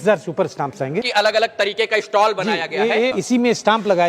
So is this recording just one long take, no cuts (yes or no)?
no